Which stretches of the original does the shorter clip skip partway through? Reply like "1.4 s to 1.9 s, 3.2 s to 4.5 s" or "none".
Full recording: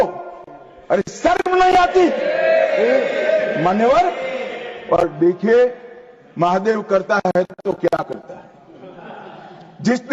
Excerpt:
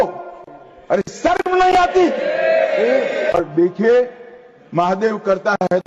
3.3 s to 5.0 s